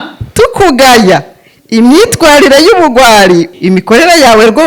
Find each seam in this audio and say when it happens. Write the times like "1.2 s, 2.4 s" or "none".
3.5 s